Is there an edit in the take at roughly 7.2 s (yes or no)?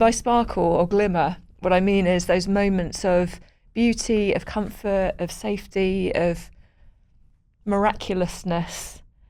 no